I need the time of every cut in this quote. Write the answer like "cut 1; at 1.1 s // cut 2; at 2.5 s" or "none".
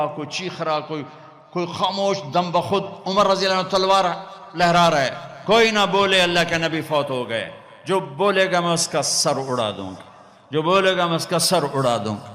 none